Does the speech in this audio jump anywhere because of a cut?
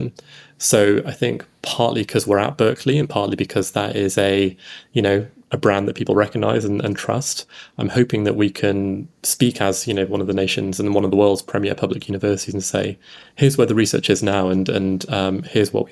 no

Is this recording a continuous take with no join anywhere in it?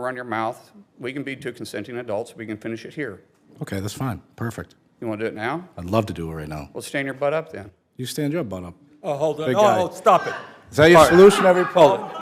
yes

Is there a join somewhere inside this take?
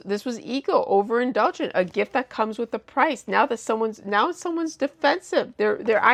no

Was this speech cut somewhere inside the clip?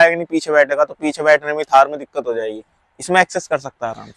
no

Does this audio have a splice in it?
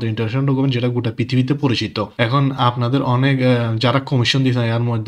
yes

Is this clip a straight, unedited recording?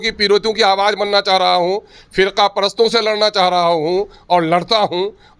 yes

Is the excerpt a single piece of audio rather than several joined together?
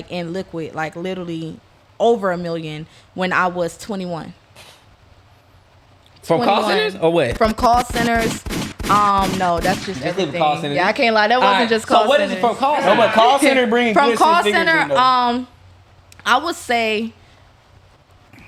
yes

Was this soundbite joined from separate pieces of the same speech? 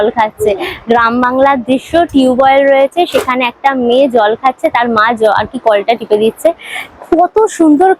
no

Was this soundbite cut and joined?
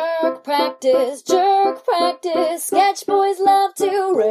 no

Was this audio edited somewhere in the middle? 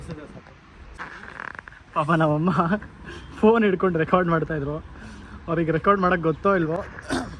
yes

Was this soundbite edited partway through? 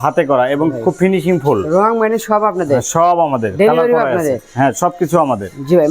no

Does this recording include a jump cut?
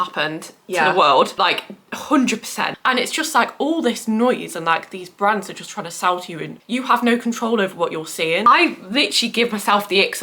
yes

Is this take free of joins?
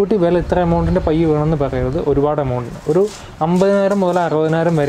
yes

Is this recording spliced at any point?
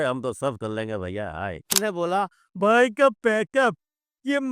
yes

